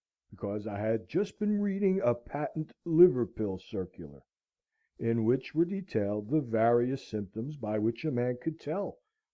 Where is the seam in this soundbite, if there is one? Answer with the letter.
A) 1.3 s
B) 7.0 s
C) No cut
A